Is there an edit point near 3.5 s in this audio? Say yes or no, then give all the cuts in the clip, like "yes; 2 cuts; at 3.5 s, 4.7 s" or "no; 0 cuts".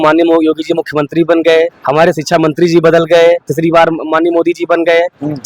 yes; 2 cuts; at 1.8 s, 3.5 s